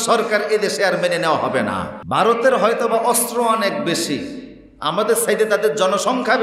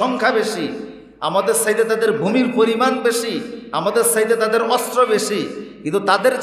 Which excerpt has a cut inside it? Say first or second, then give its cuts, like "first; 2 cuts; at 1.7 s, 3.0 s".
first; 1 cut; at 1.9 s